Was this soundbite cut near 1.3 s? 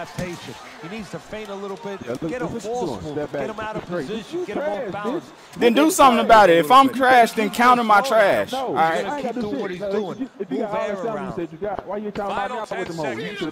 no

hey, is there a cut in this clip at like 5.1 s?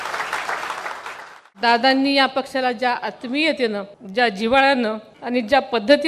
yes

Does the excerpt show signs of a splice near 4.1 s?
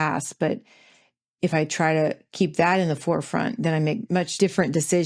yes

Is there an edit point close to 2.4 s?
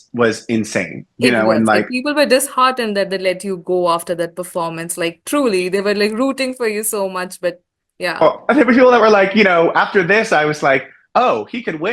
no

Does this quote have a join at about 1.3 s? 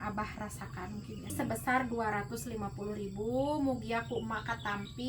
yes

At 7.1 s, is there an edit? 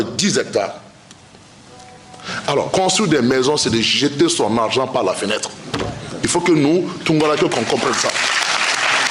no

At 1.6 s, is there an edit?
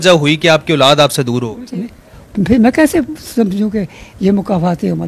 yes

